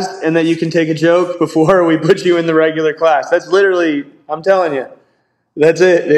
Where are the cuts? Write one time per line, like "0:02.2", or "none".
none